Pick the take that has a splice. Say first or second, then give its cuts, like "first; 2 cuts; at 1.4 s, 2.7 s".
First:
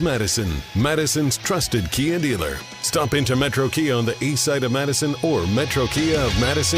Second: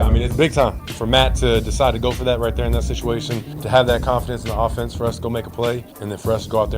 second; 3 cuts; at 0.8 s, 3.6 s, 5.9 s